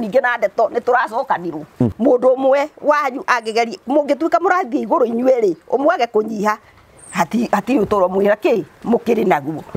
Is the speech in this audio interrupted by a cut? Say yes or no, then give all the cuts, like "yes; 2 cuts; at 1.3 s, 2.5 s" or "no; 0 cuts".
yes; 1 cut; at 1.9 s